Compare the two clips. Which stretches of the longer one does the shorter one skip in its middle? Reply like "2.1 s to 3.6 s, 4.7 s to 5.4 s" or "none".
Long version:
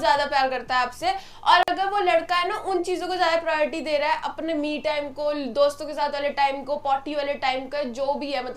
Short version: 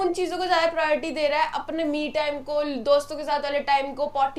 none